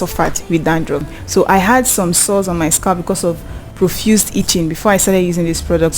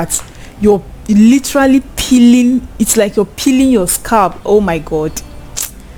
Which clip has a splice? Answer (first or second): first